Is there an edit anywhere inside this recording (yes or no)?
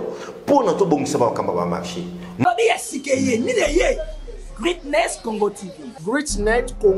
yes